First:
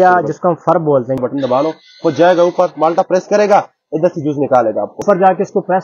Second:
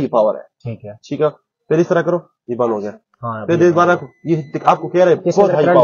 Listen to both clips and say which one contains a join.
first; 2 cuts; at 1.2 s, 5.0 s

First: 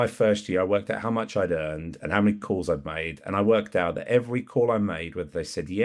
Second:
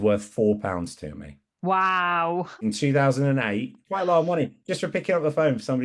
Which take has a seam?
second; 2 cuts; at 2.6 s, 3.8 s

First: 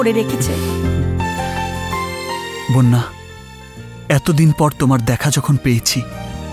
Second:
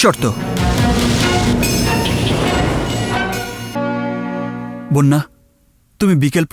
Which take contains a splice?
second; 1 cut; at 3.8 s

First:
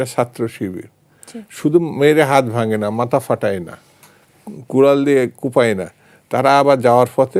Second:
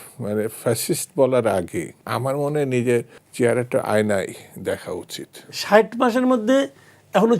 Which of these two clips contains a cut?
second; 3 cuts; at 2.0 s, 3.2 s, 5.6 s

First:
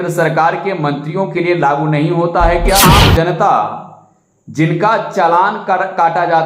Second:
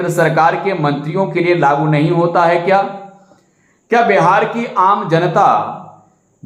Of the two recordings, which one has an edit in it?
first; 1 cut; at 2.8 s

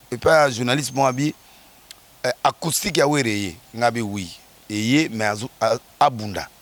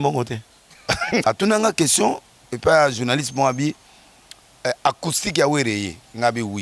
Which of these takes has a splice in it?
second; 1 cut; at 1.2 s

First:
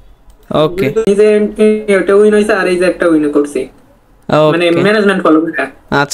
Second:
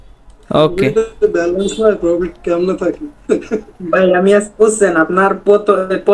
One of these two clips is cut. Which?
first; 1 cut; at 1.0 s

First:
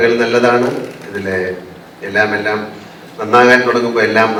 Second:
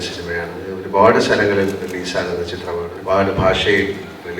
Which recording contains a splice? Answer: second; 2 cuts; at 0.8 s, 2.9 s

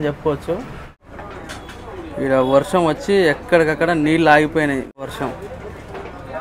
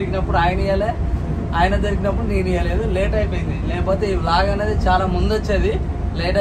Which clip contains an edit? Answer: first; 2 cuts; at 1.0 s, 5.0 s

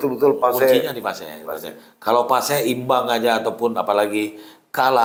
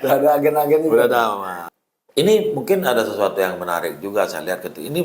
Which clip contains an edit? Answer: second; 1 cut; at 1.5 s

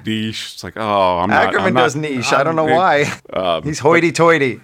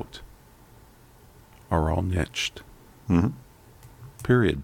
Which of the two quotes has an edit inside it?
first; 1 cut; at 3.2 s

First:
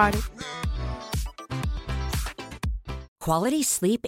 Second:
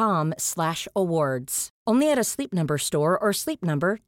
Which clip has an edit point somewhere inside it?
first; 1 cut; at 3.1 s

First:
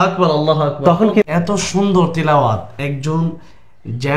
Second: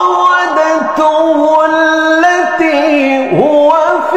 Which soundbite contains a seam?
first; 1 cut; at 1.2 s

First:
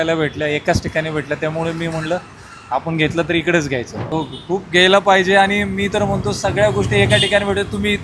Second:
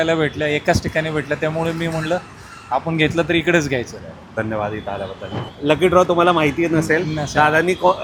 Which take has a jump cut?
first; 1 cut; at 4.0 s

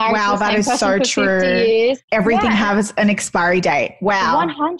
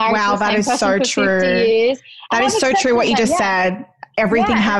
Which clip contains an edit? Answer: first; 1 cut; at 2.0 s

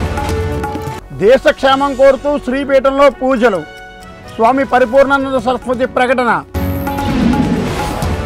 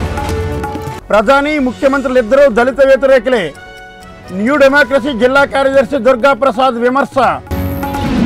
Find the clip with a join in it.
second; 1 cut; at 0.9 s

